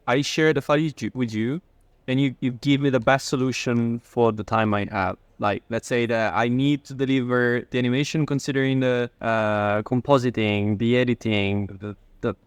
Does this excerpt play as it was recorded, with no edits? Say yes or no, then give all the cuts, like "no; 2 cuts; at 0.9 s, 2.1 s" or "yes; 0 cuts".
no; 2 cuts; at 2.4 s, 9.2 s